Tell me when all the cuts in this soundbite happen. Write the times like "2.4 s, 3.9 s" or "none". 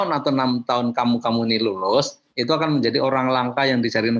none